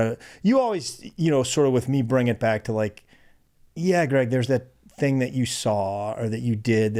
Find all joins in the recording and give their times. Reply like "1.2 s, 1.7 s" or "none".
none